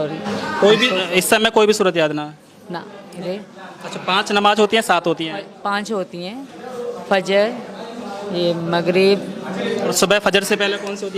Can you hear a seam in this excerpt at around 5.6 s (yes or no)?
no